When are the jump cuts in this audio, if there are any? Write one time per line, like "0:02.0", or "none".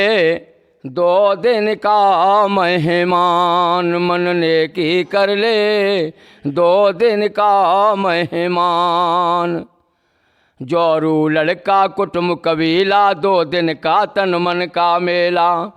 none